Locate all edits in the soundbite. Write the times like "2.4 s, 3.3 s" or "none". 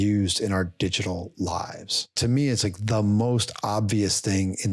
2.1 s